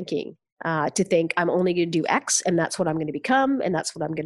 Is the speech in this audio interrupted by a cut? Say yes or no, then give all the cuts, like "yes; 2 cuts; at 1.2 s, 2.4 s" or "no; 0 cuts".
no; 0 cuts